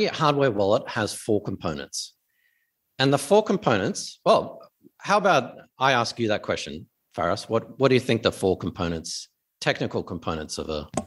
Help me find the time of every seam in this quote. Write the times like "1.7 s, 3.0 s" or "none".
none

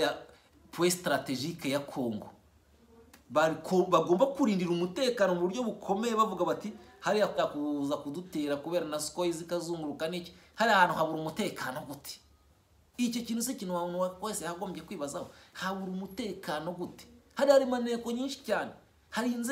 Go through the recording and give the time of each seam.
7.4 s

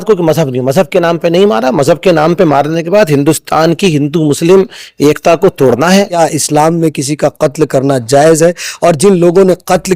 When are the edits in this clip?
6.2 s

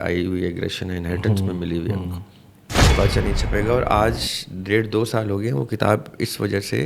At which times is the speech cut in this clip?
2.9 s

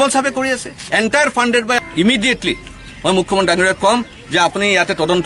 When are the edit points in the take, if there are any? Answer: 1.8 s

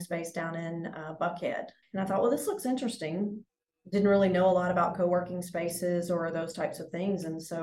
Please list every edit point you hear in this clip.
1.8 s

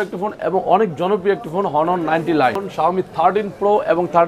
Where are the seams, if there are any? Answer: 2.7 s

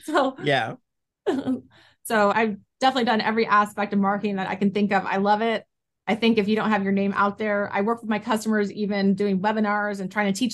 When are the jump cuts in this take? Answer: 2.3 s

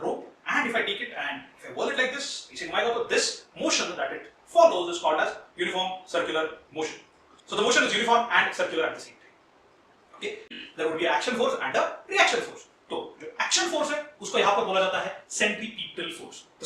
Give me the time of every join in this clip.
10.3 s

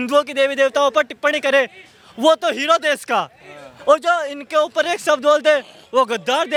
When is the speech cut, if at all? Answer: none

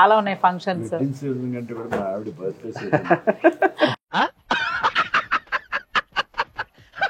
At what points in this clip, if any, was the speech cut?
none

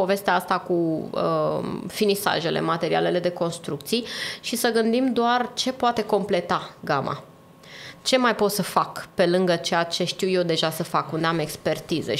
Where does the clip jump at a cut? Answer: none

